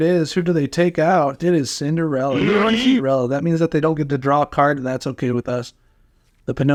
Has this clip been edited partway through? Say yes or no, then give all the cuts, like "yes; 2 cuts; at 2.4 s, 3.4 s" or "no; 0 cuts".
no; 0 cuts